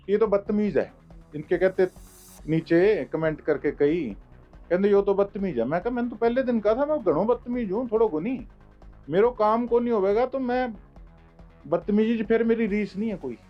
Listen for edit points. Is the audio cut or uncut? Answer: uncut